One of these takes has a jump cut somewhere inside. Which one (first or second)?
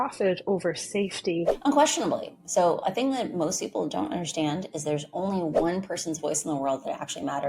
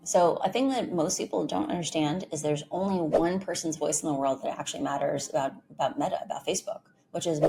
first